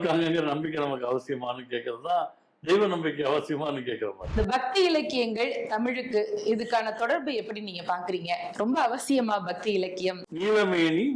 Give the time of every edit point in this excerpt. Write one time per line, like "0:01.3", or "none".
0:04.2
0:10.3